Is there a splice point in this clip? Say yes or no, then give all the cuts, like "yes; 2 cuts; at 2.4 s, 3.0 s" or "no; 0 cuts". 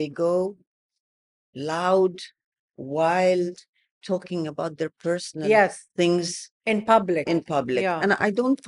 no; 0 cuts